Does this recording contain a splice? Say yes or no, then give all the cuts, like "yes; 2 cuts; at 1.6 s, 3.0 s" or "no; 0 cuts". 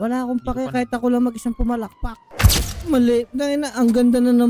yes; 1 cut; at 2.7 s